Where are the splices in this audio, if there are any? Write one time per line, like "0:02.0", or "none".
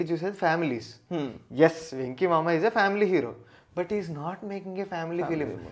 none